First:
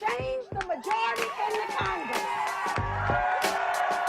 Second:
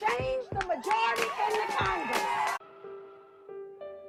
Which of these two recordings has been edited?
first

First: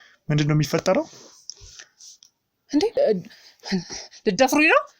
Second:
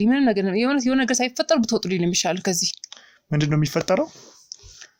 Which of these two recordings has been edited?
first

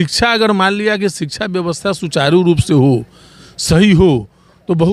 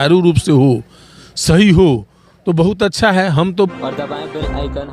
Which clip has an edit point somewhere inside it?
second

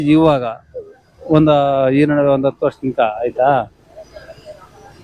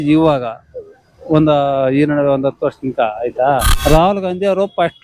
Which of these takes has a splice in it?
second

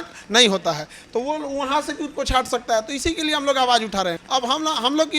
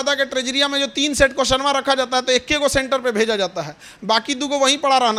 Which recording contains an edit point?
first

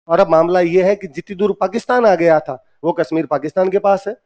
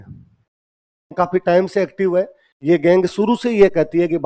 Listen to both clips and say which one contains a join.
second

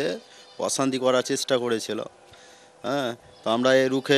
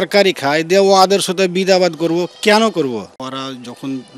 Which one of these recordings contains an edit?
second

